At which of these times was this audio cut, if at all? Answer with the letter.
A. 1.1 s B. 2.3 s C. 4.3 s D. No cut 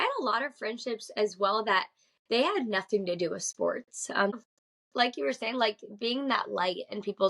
C